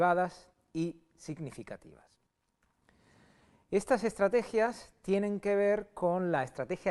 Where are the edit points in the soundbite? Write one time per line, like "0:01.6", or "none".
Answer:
0:02.3